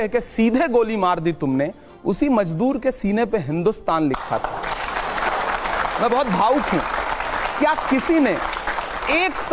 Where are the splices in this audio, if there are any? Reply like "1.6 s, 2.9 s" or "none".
none